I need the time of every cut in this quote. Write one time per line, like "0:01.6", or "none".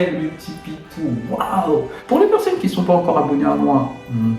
0:02.0